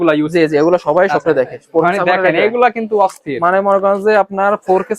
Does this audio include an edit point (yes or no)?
no